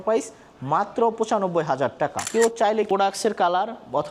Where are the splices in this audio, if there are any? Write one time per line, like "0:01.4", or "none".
0:02.2
0:02.9